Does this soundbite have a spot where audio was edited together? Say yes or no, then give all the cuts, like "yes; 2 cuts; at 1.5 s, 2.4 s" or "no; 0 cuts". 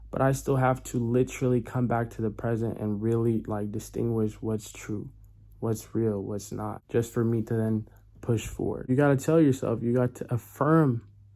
yes; 2 cuts; at 6.8 s, 8.9 s